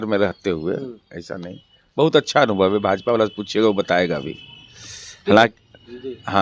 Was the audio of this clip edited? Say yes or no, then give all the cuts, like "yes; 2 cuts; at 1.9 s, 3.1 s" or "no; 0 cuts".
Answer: no; 0 cuts